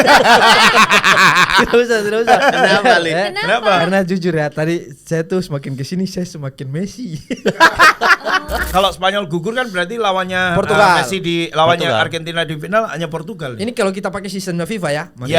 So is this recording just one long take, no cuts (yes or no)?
no